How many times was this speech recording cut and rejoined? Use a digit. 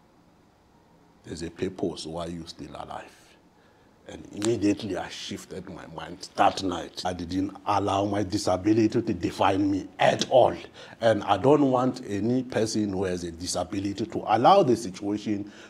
1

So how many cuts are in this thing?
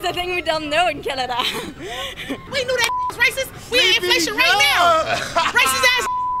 1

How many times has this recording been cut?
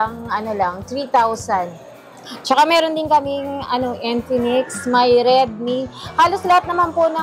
0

